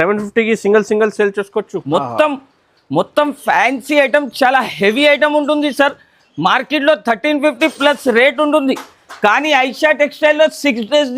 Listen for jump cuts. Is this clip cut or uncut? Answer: cut